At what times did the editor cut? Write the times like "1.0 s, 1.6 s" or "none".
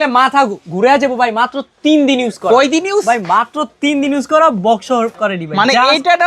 none